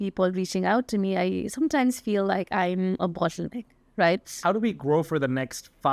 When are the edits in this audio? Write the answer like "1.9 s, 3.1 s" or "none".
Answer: 4.4 s